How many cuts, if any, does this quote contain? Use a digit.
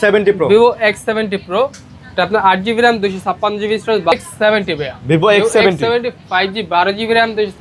1